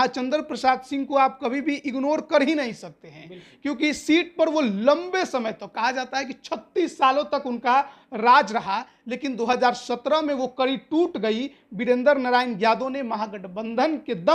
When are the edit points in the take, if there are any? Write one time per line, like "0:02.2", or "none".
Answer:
none